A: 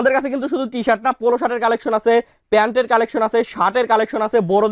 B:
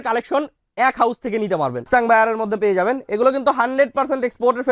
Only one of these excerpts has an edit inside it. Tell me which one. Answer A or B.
B